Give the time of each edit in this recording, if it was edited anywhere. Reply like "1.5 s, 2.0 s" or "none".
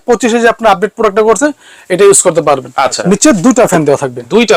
2.9 s